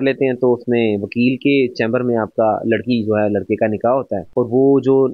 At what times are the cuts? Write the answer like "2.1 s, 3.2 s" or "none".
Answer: none